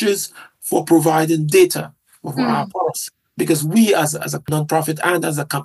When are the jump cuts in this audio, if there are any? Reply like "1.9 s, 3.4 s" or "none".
none